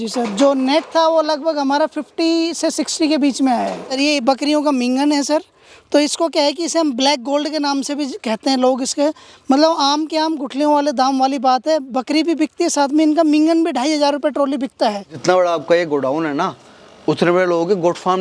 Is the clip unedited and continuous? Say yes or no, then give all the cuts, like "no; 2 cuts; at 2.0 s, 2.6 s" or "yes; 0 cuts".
no; 2 cuts; at 4.0 s, 15.2 s